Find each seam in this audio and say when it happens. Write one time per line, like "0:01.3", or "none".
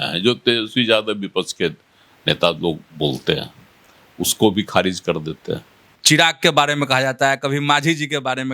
0:05.9